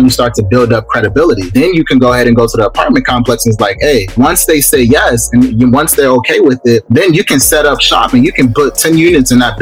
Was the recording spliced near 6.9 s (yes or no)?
yes